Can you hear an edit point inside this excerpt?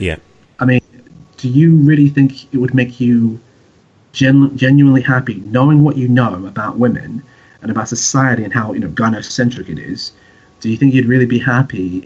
no; 0 cuts

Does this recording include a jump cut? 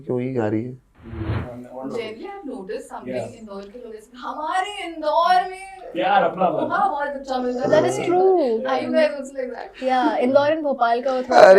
yes; 1 cut; at 1.4 s

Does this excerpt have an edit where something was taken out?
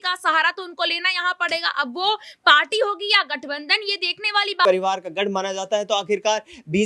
yes; 1 cut; at 4.7 s

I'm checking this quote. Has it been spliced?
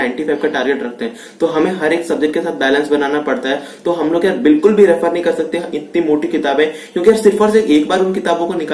no; 0 cuts

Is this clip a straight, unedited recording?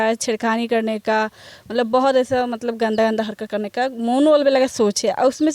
yes; 0 cuts

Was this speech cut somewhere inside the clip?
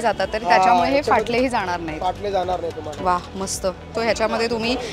yes; 1 cut; at 3.9 s

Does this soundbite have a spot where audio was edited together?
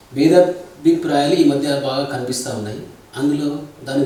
no; 0 cuts

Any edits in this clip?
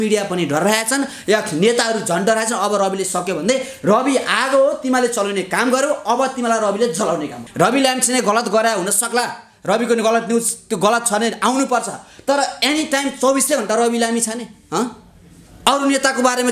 yes; 1 cut; at 7.4 s

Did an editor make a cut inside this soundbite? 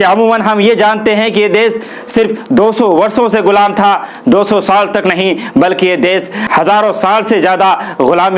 no; 0 cuts

